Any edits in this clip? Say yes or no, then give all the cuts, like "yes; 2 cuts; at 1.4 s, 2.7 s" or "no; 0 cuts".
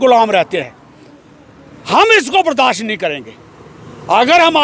no; 0 cuts